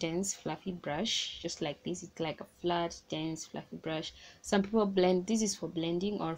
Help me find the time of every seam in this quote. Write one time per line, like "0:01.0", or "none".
none